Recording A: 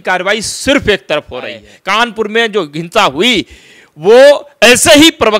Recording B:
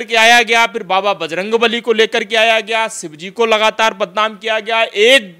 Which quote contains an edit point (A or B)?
A